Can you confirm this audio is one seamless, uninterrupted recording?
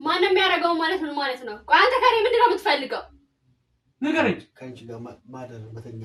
yes; 0 cuts

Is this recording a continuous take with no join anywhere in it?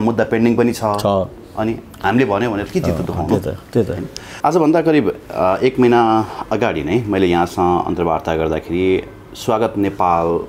yes; 0 cuts

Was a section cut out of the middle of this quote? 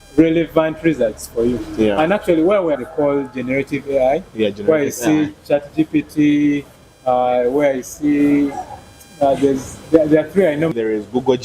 yes; 2 cuts; at 2.8 s, 10.7 s

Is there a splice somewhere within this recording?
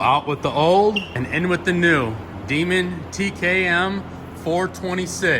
yes; 1 cut; at 1.1 s

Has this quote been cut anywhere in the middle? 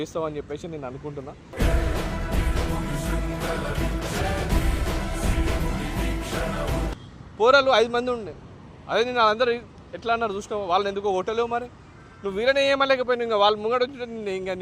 yes; 1 cut; at 7.0 s

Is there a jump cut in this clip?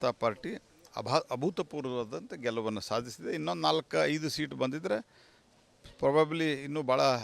yes; 1 cut; at 6.3 s

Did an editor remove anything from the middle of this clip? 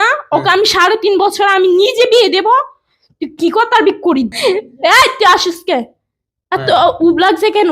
yes; 1 cut; at 4.3 s

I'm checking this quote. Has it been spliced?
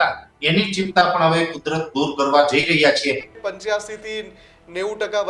yes; 1 cut; at 3.3 s

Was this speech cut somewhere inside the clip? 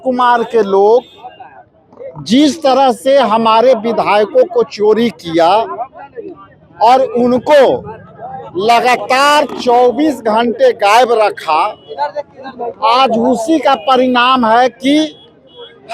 no; 0 cuts

